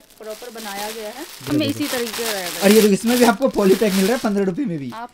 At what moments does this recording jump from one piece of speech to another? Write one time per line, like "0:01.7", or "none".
0:01.5